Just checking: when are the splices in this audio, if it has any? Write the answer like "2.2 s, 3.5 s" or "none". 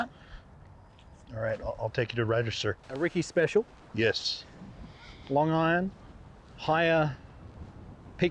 2.9 s